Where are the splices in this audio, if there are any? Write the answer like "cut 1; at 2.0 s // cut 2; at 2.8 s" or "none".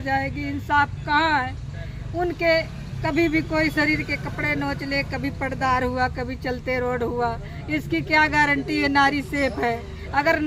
none